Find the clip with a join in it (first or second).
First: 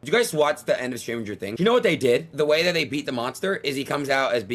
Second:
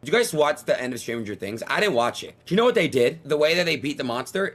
first